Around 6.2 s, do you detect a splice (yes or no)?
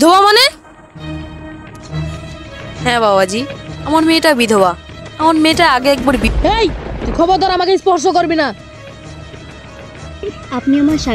yes